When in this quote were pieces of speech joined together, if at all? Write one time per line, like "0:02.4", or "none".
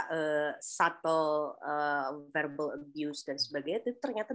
none